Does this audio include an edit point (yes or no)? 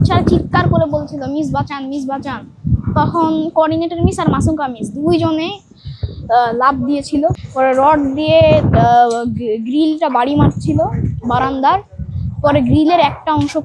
yes